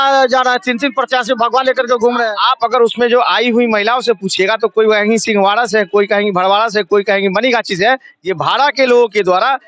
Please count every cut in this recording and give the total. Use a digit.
0